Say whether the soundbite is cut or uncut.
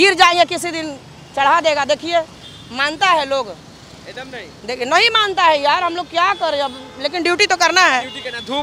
uncut